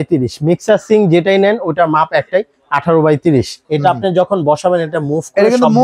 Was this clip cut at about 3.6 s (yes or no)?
yes